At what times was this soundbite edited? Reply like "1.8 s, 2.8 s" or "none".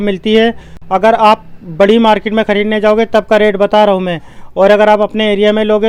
none